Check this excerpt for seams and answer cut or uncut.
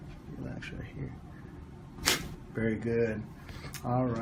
cut